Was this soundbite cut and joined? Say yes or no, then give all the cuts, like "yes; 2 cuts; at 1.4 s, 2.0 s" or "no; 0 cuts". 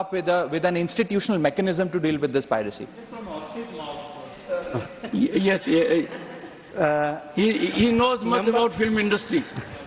no; 0 cuts